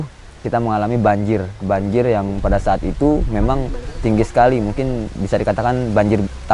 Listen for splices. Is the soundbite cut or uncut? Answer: uncut